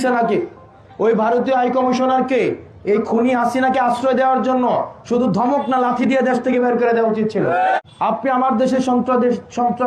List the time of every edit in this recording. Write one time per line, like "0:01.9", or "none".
0:07.8